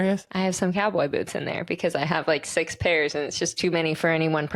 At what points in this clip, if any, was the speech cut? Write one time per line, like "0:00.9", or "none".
none

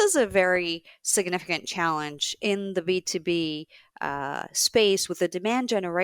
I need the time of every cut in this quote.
none

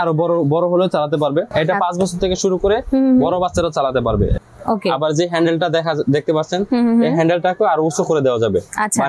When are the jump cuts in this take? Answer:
0:01.5
0:04.3

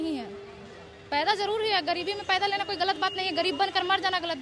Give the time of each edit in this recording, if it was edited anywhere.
none

